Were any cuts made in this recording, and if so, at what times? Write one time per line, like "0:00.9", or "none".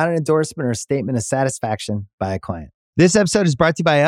0:02.8